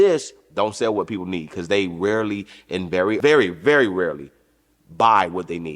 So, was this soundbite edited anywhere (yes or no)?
yes